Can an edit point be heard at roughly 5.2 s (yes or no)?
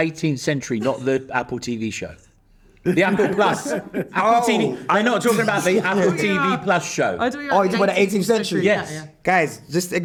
no